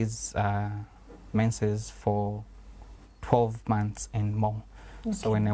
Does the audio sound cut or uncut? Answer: uncut